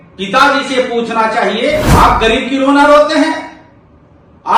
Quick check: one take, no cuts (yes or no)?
no